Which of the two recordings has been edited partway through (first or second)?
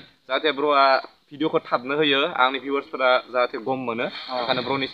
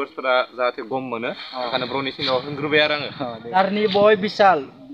second